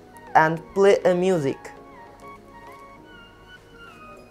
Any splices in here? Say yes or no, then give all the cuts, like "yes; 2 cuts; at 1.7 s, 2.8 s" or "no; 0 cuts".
no; 0 cuts